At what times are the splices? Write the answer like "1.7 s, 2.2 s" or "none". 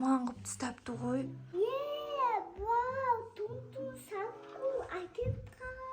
1.4 s